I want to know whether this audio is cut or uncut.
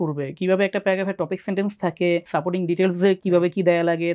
cut